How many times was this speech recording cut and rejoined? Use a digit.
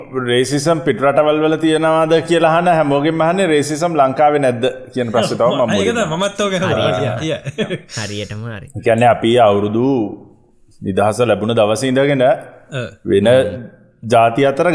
0